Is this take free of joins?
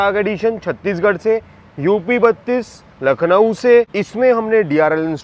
no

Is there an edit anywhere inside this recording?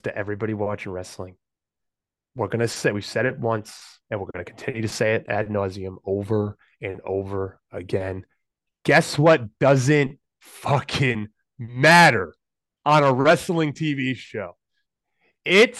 no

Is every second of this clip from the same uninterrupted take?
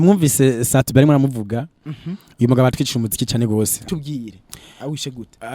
no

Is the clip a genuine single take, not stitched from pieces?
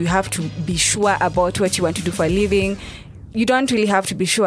yes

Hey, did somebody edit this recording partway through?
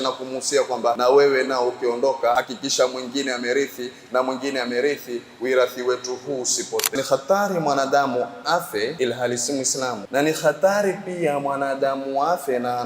yes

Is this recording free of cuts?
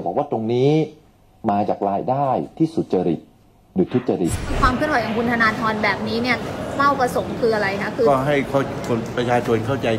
no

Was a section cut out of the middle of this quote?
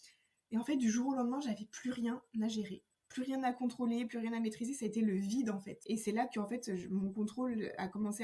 yes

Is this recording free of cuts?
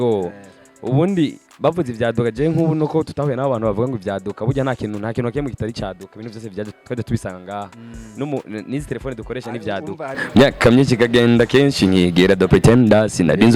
no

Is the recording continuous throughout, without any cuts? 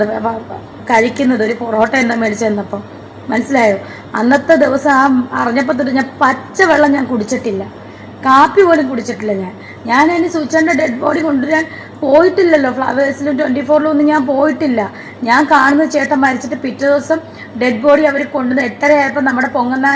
yes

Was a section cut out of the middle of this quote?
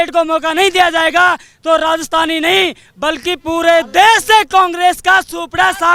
no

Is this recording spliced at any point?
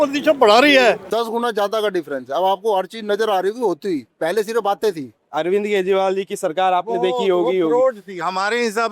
yes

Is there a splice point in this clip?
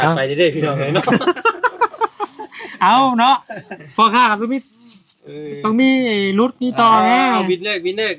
no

